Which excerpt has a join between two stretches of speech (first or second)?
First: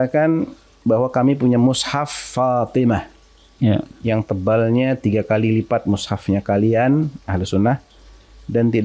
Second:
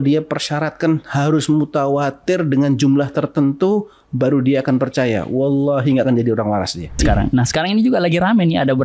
second